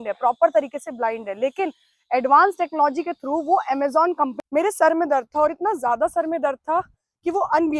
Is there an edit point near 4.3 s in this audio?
yes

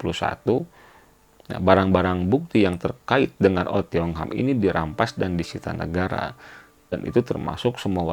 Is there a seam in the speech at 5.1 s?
no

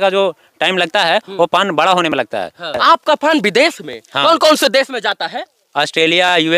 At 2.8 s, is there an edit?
yes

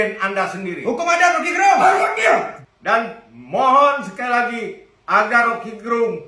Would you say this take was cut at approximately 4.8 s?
no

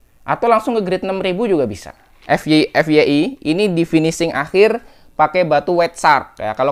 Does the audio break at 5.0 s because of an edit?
no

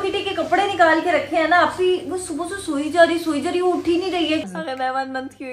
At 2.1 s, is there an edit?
no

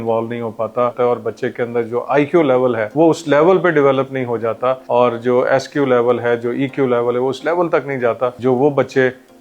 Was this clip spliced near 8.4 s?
yes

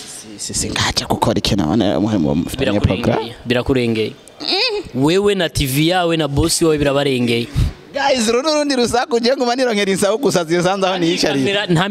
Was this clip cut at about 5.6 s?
no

